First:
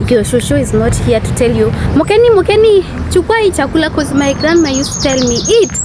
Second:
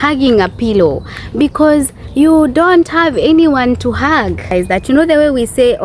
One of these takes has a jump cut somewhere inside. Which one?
second; 1 cut; at 4.5 s

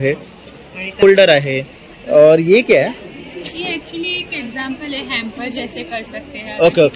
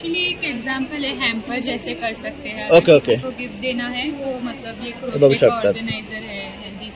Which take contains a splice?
first; 1 cut; at 1.0 s

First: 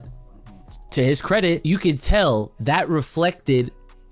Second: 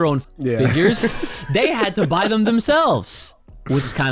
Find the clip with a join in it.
first; 1 cut; at 1.6 s

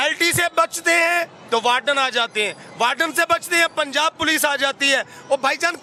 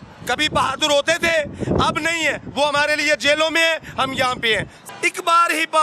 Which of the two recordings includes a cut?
second; 1 cut; at 4.7 s

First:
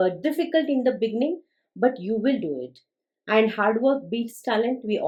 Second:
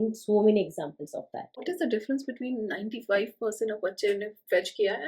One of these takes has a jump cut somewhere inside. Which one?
second; 1 cut; at 1.6 s

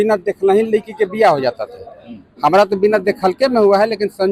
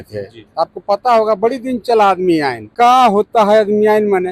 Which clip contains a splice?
second; 1 cut; at 2.7 s

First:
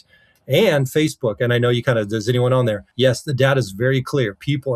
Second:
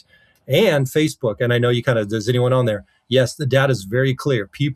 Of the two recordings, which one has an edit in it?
first; 1 cut; at 2.9 s

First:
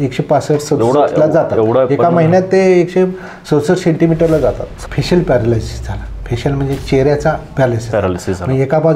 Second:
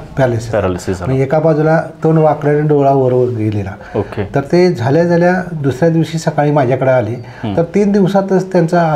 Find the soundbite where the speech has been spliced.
first; 1 cut; at 4.7 s

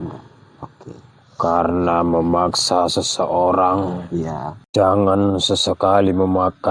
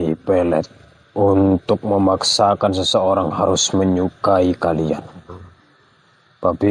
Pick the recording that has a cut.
first; 1 cut; at 4.7 s

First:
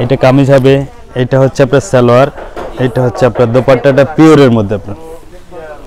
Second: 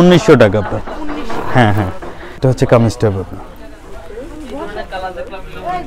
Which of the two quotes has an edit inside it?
second; 1 cut; at 2.4 s

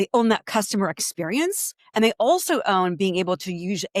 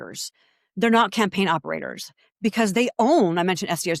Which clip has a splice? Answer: first; 1 cut; at 1.7 s

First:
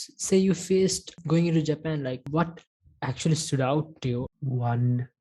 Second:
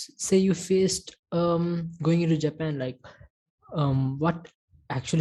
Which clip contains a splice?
first; 3 cuts; at 1.1 s, 2.3 s, 4.3 s

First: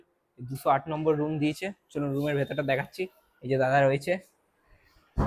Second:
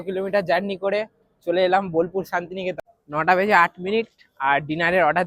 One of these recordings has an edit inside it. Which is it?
second; 1 cut; at 2.9 s

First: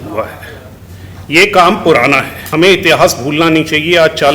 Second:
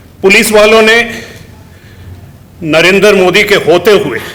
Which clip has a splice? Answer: first; 1 cut; at 2.4 s

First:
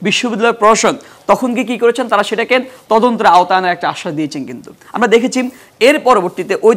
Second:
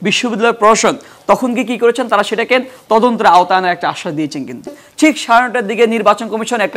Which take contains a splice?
second; 1 cut; at 4.8 s

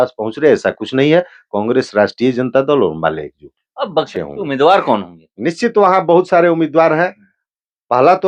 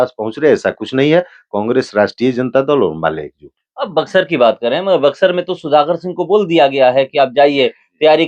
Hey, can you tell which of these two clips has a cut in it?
first; 1 cut; at 4.1 s

